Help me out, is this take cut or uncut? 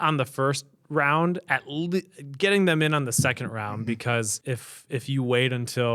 cut